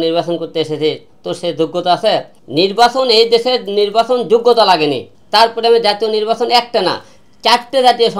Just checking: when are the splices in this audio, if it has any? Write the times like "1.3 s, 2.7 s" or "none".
2.4 s, 5.1 s